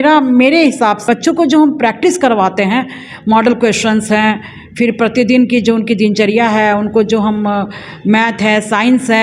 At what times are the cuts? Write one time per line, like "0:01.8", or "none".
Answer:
0:01.0